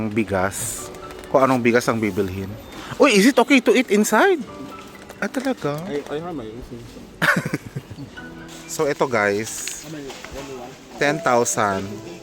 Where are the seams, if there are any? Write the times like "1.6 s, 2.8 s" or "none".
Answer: 8.6 s